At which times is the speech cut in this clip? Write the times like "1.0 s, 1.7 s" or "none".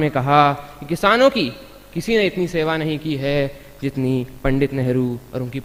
none

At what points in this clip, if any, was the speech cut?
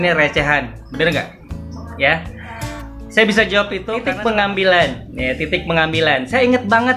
3.9 s

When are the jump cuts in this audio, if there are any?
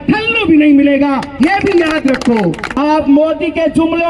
2.7 s

